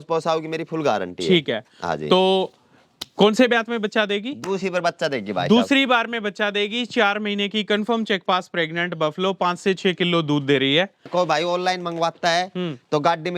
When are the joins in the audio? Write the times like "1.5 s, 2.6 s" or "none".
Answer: 11.1 s